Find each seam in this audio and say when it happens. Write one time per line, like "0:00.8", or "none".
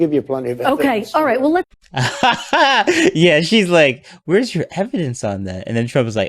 0:01.8